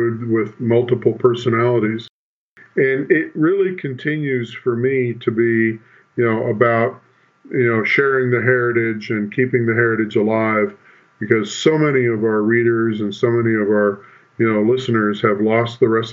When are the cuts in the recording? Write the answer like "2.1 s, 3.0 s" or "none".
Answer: 2.3 s